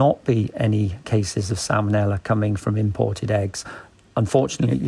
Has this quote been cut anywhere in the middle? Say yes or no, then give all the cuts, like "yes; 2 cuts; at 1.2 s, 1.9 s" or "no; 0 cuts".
no; 0 cuts